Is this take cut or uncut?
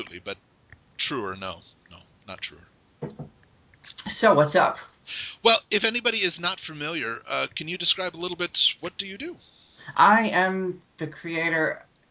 cut